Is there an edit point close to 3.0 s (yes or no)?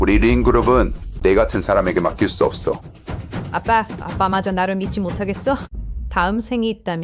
no